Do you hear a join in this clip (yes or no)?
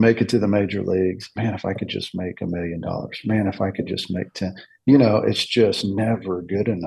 no